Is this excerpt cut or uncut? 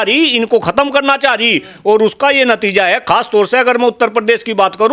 uncut